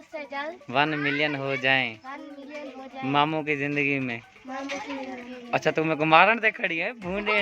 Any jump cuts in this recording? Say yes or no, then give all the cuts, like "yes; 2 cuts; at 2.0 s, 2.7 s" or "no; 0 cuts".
no; 0 cuts